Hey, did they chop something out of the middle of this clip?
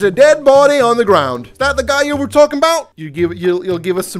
no; 0 cuts

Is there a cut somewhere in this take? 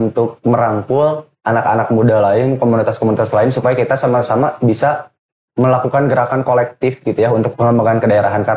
yes; 1 cut; at 7.5 s

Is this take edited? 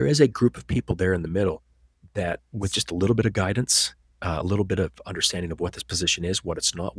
no; 0 cuts

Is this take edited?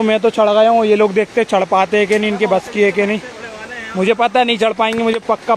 no; 0 cuts

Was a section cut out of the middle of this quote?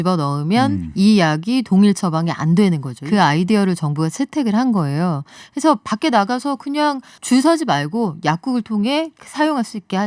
yes; 2 cuts; at 2.9 s, 7.1 s

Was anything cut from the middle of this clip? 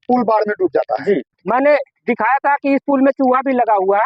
yes; 1 cut; at 1.3 s

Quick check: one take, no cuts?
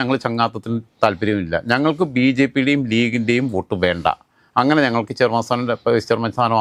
yes; 0 cuts

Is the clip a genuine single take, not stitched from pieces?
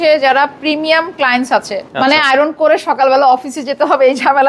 no; 1 cut; at 1.8 s

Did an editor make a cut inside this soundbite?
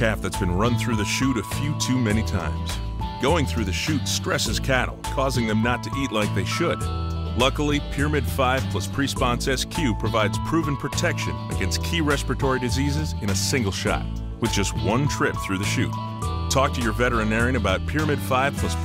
no; 0 cuts

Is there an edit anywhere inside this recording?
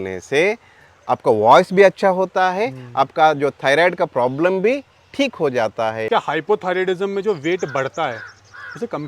yes; 1 cut; at 6.1 s

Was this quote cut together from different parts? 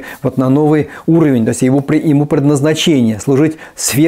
no; 0 cuts

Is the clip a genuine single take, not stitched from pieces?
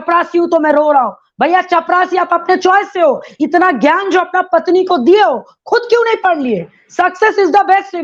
yes; 0 cuts

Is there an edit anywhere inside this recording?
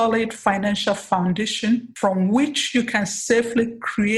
yes; 1 cut; at 1.9 s

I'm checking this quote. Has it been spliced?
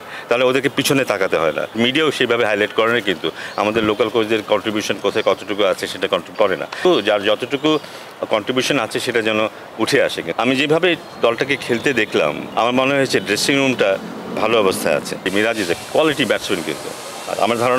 yes; 5 cuts; at 1.7 s, 6.8 s, 10.2 s, 12.4 s, 15.2 s

